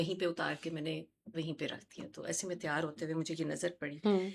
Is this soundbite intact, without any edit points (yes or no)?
yes